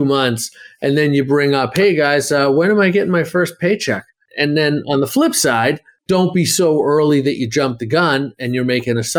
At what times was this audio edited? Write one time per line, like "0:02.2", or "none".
0:04.2